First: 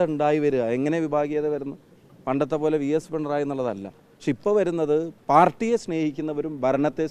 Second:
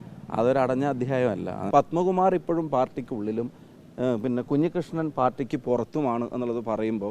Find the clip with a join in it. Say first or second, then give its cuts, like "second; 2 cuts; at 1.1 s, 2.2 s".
second; 1 cut; at 1.6 s